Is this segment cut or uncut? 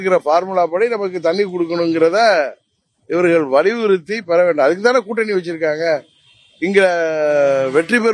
uncut